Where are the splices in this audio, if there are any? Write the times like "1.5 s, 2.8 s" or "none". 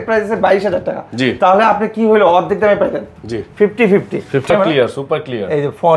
4.5 s